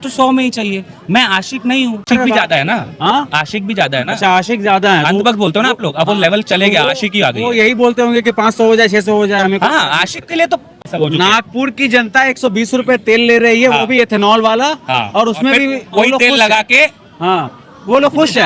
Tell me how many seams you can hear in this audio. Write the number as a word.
two